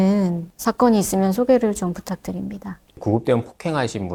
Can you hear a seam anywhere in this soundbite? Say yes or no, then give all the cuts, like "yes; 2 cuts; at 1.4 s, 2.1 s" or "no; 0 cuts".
no; 0 cuts